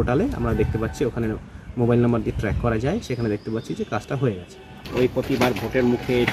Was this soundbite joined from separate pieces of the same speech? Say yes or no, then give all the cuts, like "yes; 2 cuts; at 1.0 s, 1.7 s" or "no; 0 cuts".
yes; 1 cut; at 4.7 s